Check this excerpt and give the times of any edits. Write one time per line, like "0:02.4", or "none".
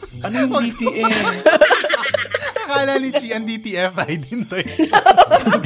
none